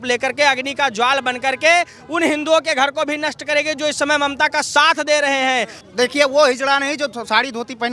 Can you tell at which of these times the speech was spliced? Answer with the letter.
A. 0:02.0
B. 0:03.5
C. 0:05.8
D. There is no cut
C